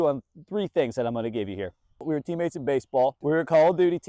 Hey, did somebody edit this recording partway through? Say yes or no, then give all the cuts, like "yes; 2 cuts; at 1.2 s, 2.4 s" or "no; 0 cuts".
yes; 2 cuts; at 2.0 s, 3.2 s